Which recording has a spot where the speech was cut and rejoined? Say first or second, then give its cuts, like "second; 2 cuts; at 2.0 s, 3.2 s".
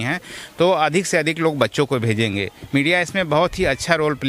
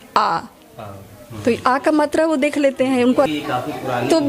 second; 1 cut; at 3.0 s